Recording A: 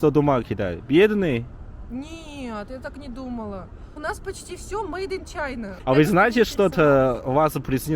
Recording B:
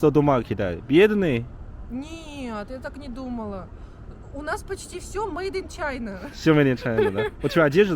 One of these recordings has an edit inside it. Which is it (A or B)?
A